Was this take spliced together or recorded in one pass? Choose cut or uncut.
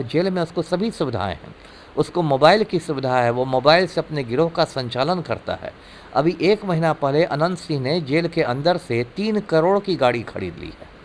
uncut